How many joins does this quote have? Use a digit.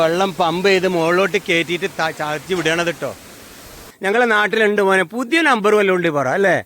1